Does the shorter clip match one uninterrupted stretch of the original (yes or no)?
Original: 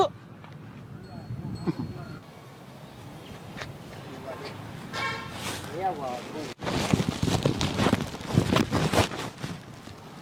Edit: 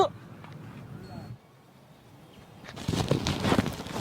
no